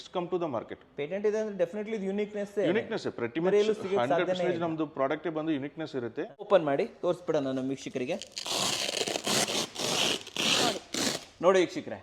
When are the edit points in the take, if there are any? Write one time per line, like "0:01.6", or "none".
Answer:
0:06.5